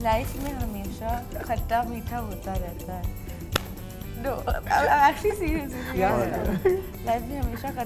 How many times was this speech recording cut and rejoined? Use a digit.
0